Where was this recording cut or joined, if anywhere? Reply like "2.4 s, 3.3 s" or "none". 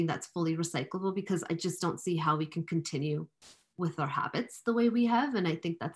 none